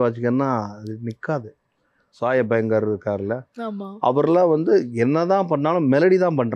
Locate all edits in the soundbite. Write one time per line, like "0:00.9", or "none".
0:02.0